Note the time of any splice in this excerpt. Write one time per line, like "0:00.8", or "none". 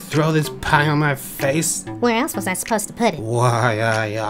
0:01.8
0:03.2